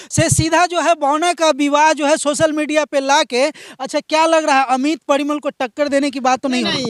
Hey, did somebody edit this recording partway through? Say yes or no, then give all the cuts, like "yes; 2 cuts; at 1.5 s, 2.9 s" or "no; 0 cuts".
no; 0 cuts